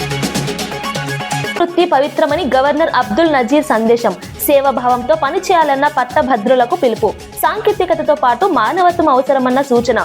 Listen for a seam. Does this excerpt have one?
yes; 1 cut; at 1.6 s

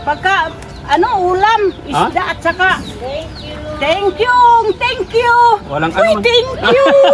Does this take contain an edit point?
no; 0 cuts

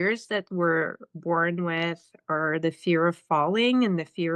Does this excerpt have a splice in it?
no; 0 cuts

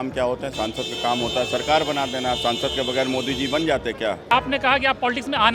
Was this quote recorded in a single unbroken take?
no; 1 cut; at 4.3 s

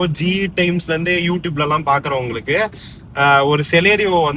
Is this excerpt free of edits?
yes; 0 cuts

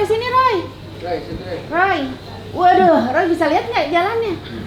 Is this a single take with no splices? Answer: yes; 0 cuts

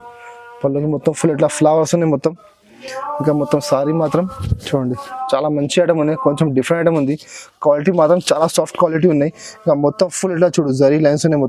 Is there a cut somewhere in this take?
no; 0 cuts

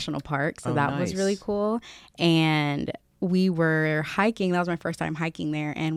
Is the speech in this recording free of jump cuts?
yes; 0 cuts

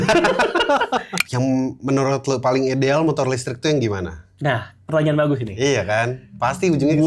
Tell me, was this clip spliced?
yes; 1 cut; at 1.1 s

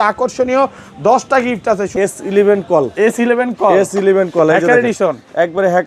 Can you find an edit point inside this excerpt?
yes; 1 cut; at 1.9 s

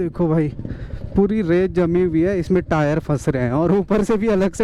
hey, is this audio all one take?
yes; 0 cuts

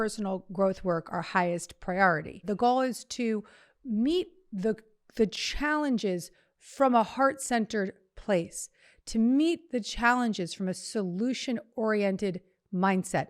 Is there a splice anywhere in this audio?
yes; 1 cut; at 2.4 s

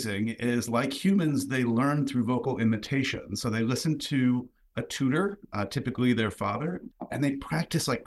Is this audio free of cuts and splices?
no; 1 cut; at 6.9 s

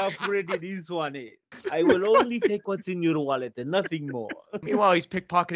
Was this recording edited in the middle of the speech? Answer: yes; 2 cuts; at 1.6 s, 4.6 s

